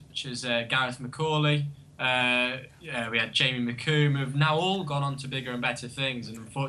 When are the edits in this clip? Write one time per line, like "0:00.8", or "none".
none